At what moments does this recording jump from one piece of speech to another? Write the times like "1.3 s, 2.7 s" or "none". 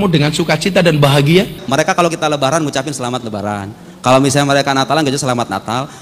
1.9 s